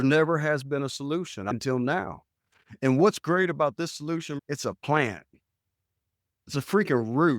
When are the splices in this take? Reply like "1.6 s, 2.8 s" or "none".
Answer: 4.3 s